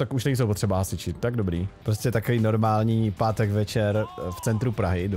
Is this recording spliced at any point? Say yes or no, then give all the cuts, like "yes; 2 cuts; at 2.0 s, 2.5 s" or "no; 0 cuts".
yes; 1 cut; at 1.8 s